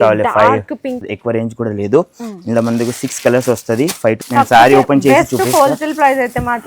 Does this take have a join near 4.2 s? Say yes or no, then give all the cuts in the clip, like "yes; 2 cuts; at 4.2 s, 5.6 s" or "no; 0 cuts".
yes; 2 cuts; at 1.0 s, 4.2 s